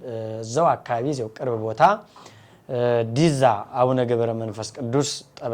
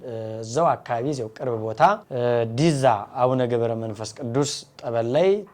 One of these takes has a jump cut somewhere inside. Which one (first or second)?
second